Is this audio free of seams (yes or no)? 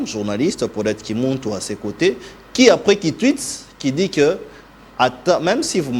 yes